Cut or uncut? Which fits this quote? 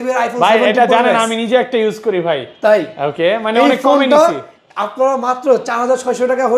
uncut